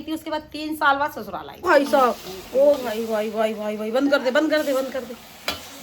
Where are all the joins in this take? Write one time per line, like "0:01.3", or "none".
0:01.6